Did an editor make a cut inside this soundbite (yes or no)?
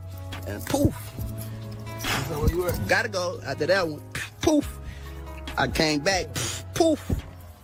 no